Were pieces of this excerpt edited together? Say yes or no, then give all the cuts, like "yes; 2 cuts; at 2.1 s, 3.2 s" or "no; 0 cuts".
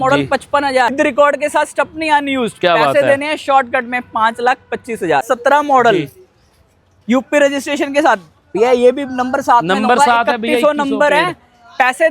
yes; 2 cuts; at 0.9 s, 5.2 s